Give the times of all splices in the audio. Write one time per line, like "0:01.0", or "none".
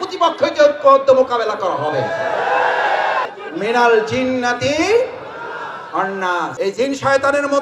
0:03.4